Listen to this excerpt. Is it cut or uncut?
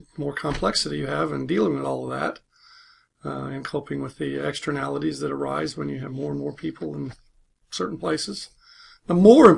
cut